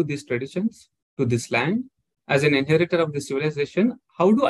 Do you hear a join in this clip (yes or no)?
no